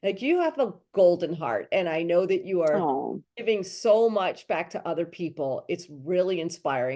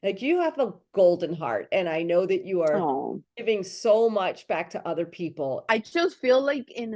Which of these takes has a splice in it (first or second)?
second